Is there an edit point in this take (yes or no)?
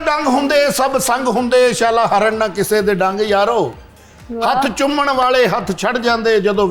no